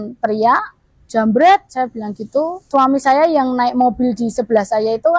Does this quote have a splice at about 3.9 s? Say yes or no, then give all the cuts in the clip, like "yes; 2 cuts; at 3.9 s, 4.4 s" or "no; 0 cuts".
no; 1 cut; at 2.6 s